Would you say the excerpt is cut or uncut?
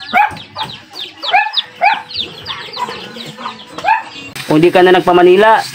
cut